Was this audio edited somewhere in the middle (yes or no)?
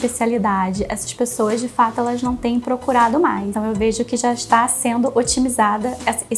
yes